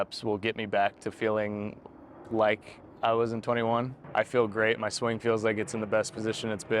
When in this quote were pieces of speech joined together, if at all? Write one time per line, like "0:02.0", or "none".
0:04.0